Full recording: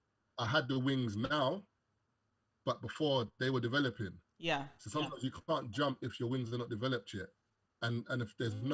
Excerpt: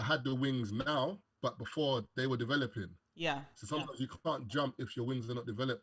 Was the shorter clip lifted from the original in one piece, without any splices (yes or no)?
no